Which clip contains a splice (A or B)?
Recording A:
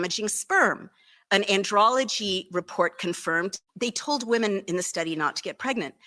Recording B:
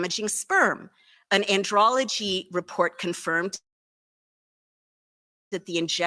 A